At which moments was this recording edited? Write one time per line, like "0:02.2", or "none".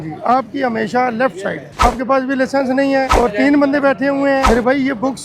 0:01.8
0:03.1
0:04.5